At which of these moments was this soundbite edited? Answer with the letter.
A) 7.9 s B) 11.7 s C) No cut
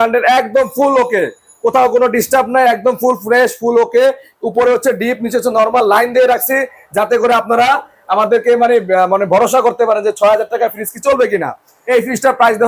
B